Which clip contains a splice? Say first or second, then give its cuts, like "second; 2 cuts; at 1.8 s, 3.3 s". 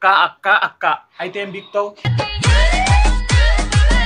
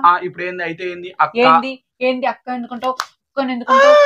first; 1 cut; at 2.0 s